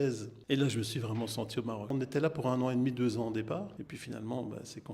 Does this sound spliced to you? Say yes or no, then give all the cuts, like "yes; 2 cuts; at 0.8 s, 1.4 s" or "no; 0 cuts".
yes; 2 cuts; at 1.9 s, 3.8 s